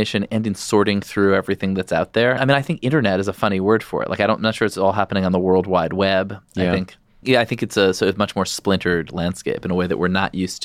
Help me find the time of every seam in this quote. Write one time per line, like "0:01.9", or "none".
0:02.4
0:07.2